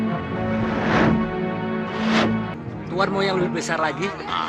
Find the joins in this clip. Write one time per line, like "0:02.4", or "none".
0:02.5